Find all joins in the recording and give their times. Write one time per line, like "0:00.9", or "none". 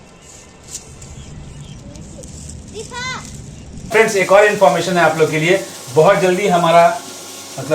0:03.9